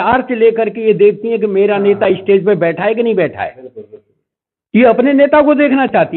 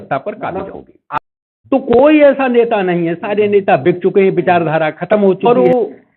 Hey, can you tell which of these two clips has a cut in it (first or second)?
second